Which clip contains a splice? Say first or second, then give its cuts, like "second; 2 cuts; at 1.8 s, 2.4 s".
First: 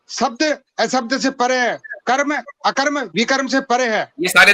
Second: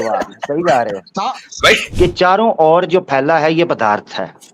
second; 1 cut; at 1.9 s